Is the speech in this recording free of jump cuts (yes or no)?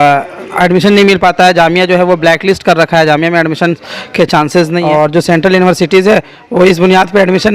no